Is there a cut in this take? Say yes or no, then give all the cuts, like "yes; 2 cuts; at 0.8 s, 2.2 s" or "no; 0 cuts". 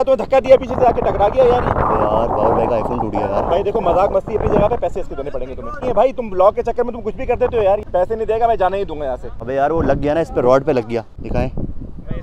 yes; 4 cuts; at 5.8 s, 7.9 s, 9.2 s, 11.2 s